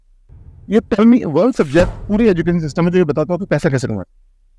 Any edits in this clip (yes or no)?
no